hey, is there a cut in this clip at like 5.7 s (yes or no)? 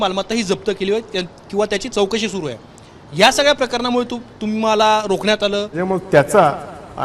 yes